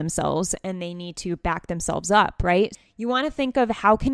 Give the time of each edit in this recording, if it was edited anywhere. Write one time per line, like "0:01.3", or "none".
0:02.9

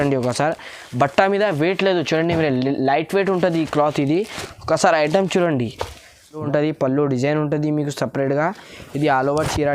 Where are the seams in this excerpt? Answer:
0:06.4

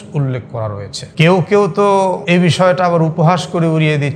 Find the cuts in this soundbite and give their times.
0:01.0
0:02.2

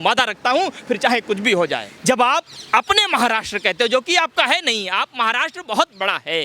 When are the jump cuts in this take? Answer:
0:01.9

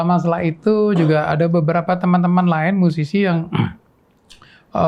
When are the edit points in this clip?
none

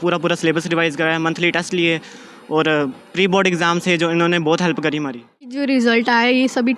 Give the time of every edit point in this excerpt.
0:05.6

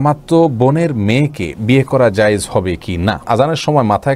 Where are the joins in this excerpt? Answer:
0:03.2

